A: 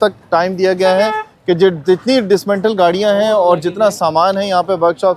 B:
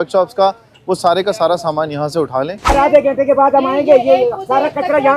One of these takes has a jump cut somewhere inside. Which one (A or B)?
B